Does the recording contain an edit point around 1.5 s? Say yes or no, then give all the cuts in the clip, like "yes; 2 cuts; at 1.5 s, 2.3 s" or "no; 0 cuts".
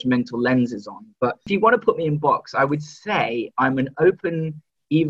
yes; 1 cut; at 1.5 s